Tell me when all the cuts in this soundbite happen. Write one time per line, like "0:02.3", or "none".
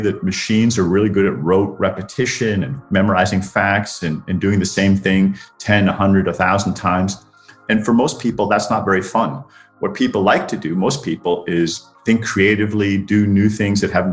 none